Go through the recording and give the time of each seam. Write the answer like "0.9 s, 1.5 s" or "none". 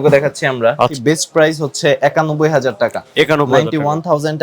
0.9 s